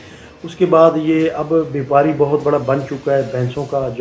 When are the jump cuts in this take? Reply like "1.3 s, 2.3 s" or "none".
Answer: none